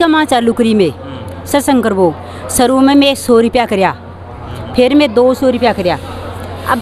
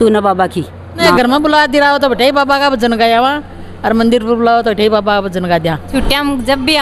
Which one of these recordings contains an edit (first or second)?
second